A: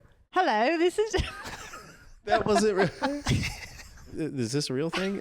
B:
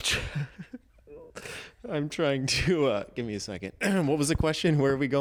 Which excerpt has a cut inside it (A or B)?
A